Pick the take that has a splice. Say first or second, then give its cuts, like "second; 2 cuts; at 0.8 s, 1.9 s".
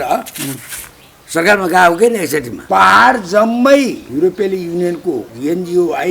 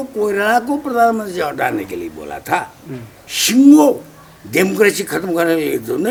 first; 3 cuts; at 2.5 s, 4.0 s, 5.3 s